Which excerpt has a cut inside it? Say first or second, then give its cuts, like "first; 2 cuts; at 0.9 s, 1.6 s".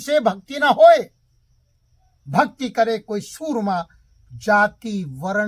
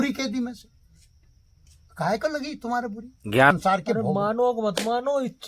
second; 1 cut; at 3.5 s